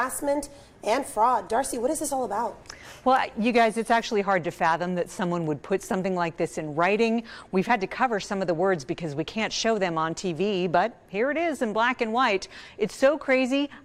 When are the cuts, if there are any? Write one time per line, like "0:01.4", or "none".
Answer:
none